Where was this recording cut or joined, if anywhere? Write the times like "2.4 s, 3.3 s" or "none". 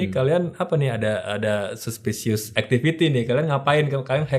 2.5 s